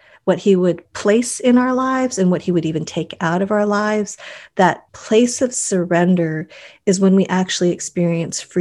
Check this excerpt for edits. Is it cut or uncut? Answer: uncut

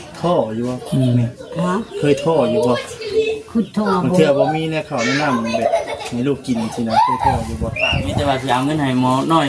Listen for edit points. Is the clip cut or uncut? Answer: cut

